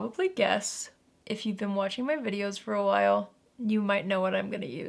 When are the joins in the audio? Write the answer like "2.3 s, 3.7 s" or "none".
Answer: none